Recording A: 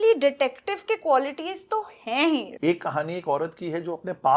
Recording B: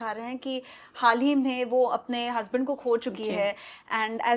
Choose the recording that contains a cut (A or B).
A